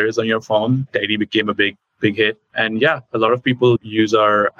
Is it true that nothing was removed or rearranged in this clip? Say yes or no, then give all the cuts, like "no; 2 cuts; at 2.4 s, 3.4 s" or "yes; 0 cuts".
yes; 0 cuts